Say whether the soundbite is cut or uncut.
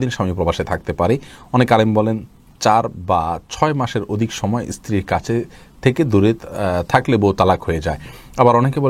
uncut